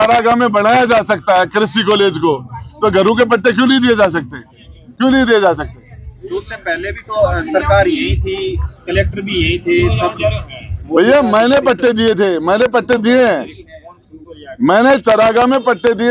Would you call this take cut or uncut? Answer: uncut